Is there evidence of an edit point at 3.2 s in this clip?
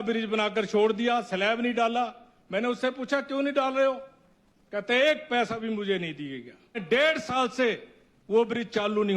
no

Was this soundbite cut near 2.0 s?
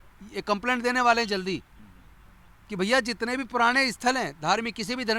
no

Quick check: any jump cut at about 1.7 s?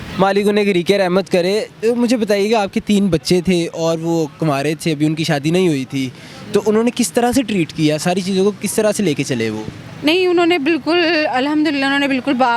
no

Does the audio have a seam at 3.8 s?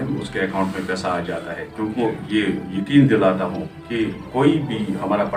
no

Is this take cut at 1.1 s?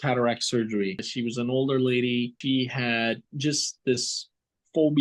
yes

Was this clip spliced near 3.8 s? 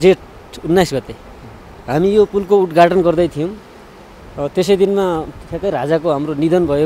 no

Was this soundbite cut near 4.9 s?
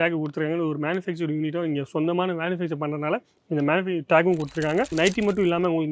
yes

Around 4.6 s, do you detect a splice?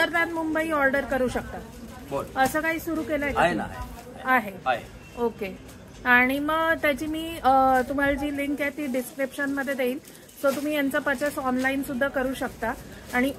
no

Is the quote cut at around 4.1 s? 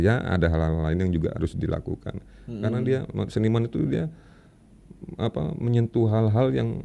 no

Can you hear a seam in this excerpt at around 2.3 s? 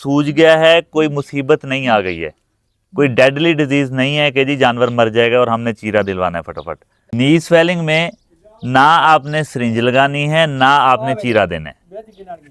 no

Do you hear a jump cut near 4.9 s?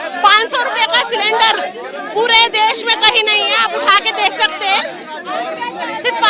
no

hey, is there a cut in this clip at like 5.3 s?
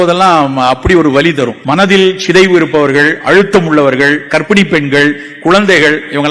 no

